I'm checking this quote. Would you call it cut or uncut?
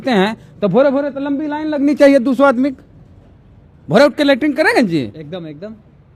uncut